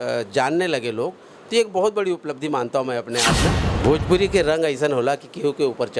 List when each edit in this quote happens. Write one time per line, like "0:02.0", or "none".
0:03.6